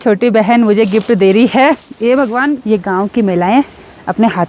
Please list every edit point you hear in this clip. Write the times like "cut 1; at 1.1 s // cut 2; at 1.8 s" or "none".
cut 1; at 2.6 s